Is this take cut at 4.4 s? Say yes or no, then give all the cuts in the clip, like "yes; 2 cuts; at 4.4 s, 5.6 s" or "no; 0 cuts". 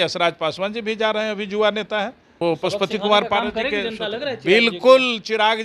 no; 1 cut; at 2.2 s